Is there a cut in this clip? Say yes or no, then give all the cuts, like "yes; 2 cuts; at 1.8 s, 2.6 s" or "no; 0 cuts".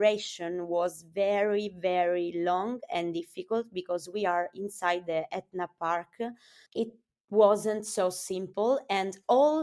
yes; 1 cut; at 6.7 s